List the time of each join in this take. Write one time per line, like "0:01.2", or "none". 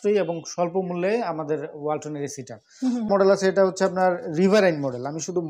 0:03.1